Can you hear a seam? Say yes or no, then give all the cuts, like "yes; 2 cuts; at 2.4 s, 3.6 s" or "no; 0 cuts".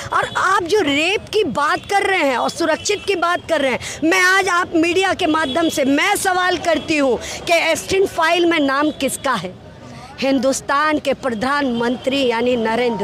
no; 0 cuts